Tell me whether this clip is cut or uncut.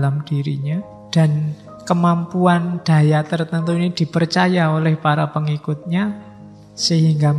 cut